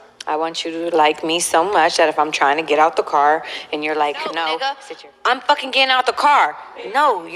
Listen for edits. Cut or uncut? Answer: cut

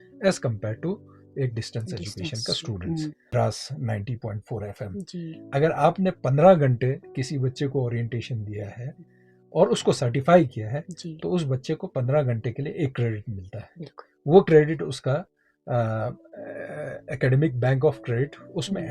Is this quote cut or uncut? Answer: cut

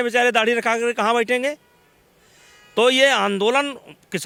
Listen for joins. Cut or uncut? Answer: uncut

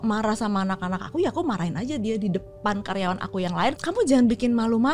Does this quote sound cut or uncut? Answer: cut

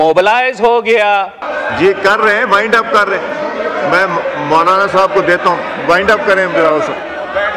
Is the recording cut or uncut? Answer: cut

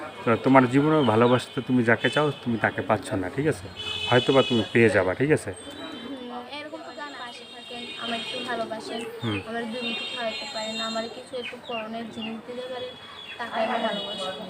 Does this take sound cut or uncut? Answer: cut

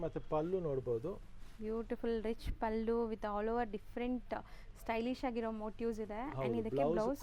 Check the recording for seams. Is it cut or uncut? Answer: uncut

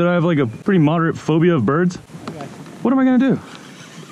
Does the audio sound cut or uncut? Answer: uncut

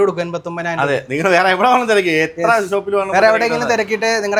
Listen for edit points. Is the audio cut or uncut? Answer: uncut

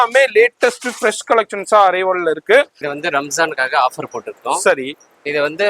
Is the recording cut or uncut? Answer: cut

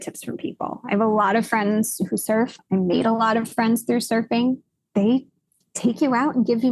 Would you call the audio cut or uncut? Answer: cut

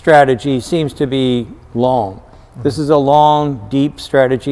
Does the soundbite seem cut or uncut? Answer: uncut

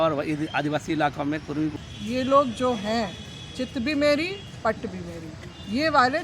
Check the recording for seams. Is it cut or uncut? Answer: cut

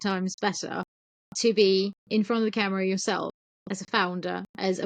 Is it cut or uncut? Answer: cut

